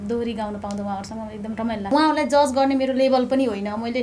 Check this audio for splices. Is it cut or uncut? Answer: cut